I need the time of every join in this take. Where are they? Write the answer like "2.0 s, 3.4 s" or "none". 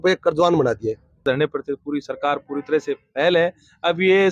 1.2 s